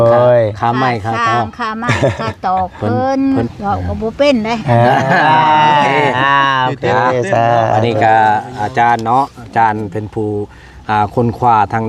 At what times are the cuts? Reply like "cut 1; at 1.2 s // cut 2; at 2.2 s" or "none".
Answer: cut 1; at 3.5 s